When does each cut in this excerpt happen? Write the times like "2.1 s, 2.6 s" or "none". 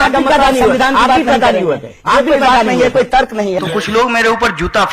3.6 s